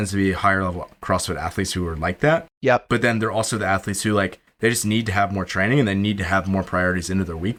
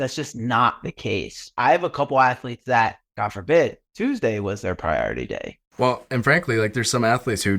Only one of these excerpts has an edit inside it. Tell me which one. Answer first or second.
second